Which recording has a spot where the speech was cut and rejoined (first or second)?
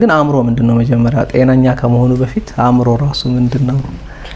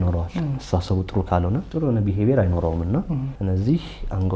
second